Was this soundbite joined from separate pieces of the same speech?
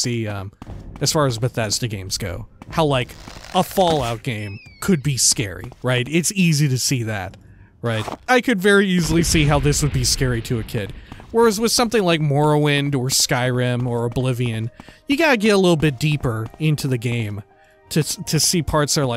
yes; 2 cuts; at 2.6 s, 8.2 s

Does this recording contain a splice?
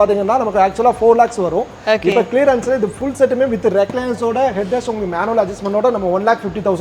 no; 0 cuts

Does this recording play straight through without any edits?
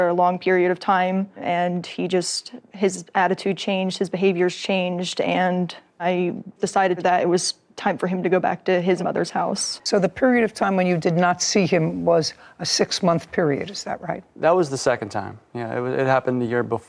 no; 1 cut; at 9.7 s

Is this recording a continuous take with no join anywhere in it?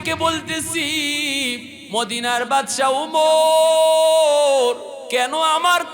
no; 2 cuts; at 1.7 s, 4.9 s

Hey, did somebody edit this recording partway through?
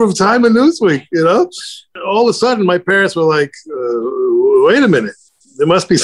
yes; 1 cut; at 2.0 s

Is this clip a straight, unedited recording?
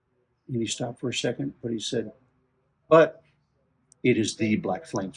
yes; 0 cuts

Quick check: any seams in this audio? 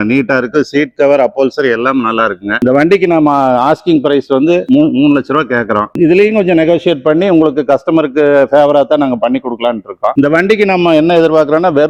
no; 0 cuts

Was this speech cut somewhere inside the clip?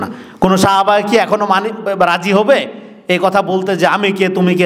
no; 0 cuts

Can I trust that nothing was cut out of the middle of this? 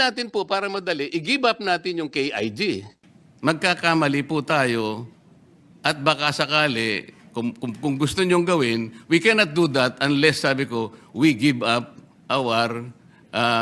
no; 1 cut; at 3.0 s

